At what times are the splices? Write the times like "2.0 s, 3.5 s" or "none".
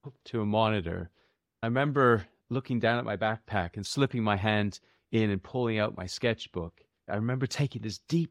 1.6 s, 2.4 s, 3.8 s, 7.1 s